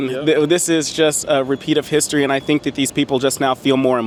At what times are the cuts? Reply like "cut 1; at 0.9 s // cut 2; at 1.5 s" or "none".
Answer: none